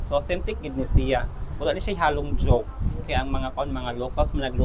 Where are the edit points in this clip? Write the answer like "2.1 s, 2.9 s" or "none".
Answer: none

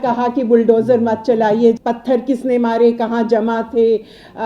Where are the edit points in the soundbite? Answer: 1.8 s

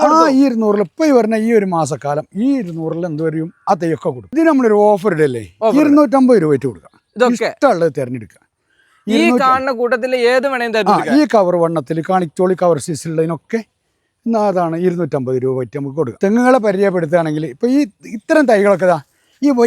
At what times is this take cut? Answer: 4.3 s, 16.2 s

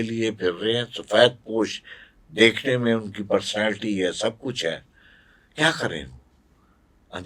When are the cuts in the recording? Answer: none

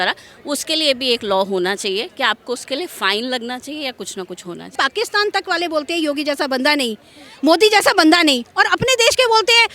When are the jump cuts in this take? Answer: 4.8 s

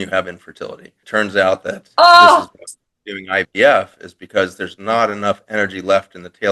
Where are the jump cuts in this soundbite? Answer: 0.9 s

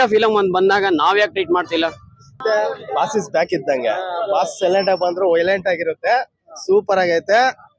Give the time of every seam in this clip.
2.4 s

